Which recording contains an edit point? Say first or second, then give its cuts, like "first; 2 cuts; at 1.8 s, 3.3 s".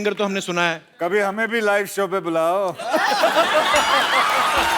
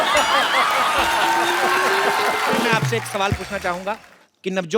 second; 1 cut; at 2.7 s